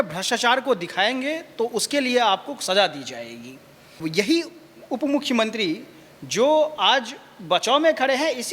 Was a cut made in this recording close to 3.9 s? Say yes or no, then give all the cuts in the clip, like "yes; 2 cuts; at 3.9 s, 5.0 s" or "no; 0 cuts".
yes; 1 cut; at 3.9 s